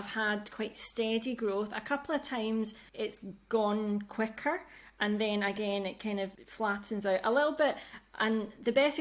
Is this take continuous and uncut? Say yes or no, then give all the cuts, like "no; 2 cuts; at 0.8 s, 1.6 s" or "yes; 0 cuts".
no; 2 cuts; at 2.8 s, 6.4 s